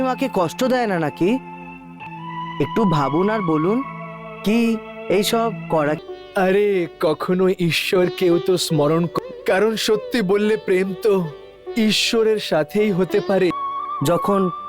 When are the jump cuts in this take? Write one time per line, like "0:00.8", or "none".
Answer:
0:02.0
0:06.0
0:09.1
0:13.5